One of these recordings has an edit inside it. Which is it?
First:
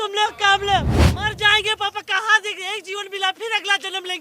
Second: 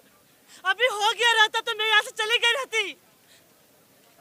first; 1 cut; at 1.0 s

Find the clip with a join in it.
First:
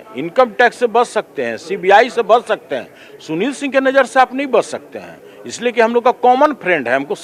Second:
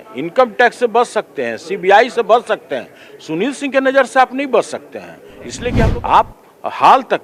second; 1 cut; at 5.8 s

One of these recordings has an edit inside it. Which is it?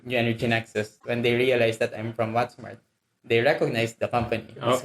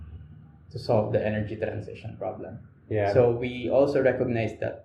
first; 1 cut; at 1.0 s

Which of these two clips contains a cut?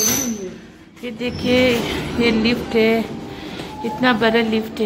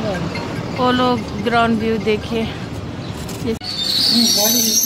second; 1 cut; at 3.6 s

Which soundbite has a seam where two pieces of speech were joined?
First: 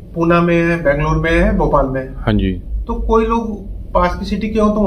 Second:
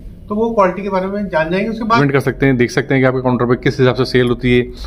second; 1 cut; at 2.0 s

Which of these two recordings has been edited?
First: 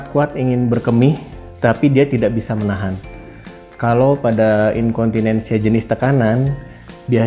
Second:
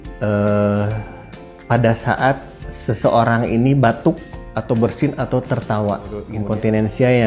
second; 1 cut; at 6.3 s

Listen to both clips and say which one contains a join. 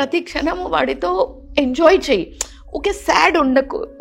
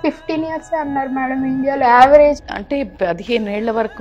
second; 1 cut; at 2.4 s

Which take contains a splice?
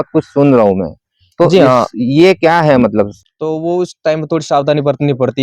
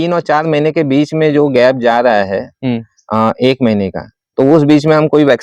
first; 1 cut; at 3.2 s

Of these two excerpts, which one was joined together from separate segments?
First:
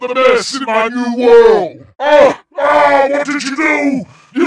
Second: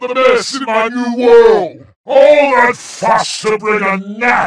second; 1 cut; at 2.0 s

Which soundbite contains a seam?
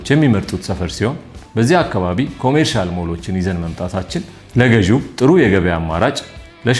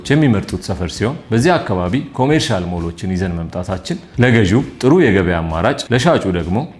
second; 3 cuts; at 1.2 s, 4.1 s, 5.8 s

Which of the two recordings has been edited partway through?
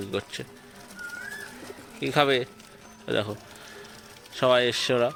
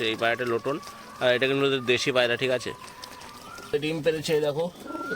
second; 1 cut; at 3.7 s

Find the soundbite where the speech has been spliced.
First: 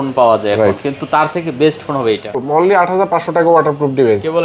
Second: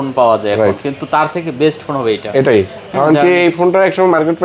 first; 1 cut; at 2.3 s

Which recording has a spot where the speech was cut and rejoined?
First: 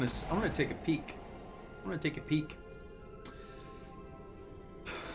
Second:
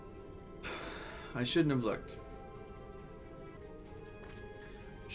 second; 1 cut; at 3.6 s

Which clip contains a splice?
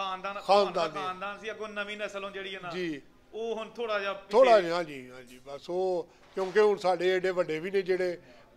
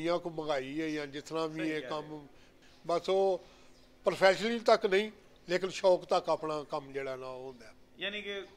second; 1 cut; at 2.5 s

